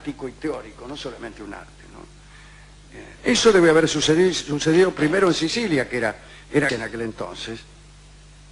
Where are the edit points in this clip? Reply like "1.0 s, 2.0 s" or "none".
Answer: none